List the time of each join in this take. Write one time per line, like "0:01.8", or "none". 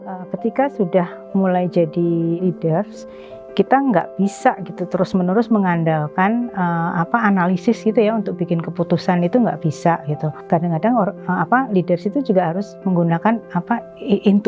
0:02.4
0:10.3